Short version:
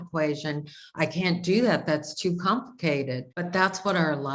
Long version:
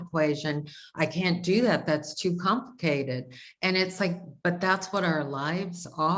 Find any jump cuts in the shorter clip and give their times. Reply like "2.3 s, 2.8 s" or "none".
3.3 s